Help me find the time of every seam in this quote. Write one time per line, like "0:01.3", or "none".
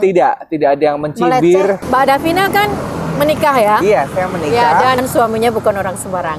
0:01.8
0:05.0